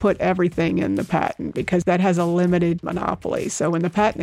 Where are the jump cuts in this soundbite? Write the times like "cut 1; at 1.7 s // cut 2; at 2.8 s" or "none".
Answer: cut 1; at 2.8 s